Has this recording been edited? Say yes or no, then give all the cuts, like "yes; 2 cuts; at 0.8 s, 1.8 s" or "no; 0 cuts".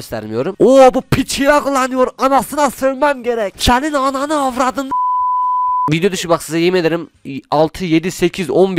yes; 1 cut; at 5.9 s